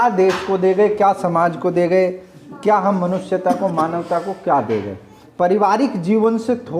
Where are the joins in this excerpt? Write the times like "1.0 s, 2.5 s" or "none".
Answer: 5.2 s